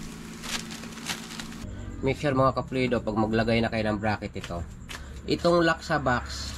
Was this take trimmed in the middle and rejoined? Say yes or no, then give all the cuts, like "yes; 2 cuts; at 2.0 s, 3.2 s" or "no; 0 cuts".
yes; 1 cut; at 1.6 s